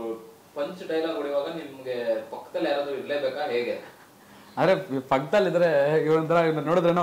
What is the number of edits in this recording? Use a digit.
0